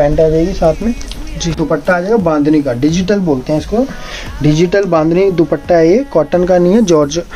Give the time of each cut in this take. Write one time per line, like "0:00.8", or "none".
0:01.6